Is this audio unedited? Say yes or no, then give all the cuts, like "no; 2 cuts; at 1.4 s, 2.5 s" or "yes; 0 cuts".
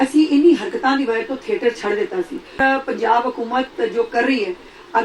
no; 1 cut; at 2.6 s